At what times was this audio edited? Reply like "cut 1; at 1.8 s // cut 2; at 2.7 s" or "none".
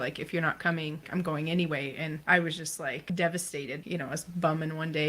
cut 1; at 1.0 s // cut 2; at 2.2 s // cut 3; at 3.0 s // cut 4; at 3.8 s